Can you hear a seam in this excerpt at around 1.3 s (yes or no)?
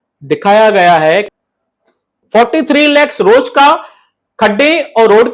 yes